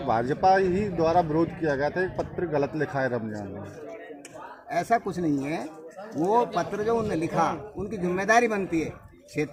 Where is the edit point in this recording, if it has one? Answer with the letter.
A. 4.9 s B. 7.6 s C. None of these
C